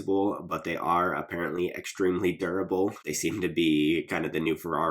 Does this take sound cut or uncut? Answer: cut